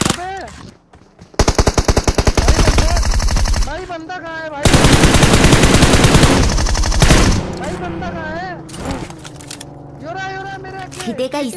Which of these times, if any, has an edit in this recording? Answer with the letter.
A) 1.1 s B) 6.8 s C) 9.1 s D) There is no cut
A